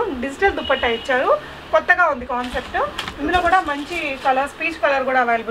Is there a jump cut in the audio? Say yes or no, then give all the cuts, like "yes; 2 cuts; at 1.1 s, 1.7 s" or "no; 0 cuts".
no; 0 cuts